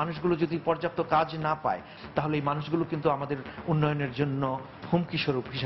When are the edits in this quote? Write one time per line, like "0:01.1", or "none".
0:01.9